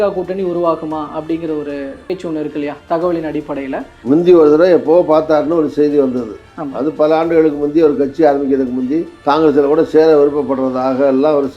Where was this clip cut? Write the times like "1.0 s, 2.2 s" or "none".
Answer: 3.9 s